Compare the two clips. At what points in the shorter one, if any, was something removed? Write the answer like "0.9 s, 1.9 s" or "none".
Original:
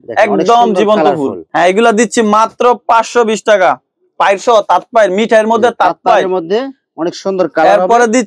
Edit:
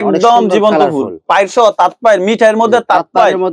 1.1 s